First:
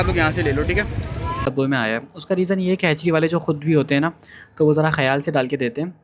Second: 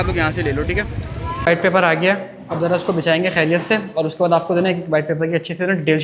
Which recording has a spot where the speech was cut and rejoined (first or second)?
first